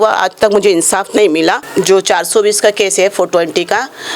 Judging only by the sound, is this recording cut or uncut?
cut